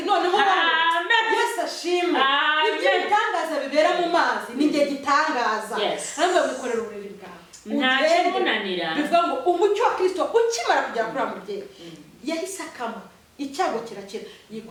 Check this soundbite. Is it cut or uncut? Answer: uncut